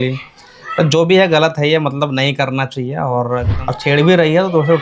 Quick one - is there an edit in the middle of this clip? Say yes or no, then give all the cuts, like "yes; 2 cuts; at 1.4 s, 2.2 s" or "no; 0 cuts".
yes; 1 cut; at 3.5 s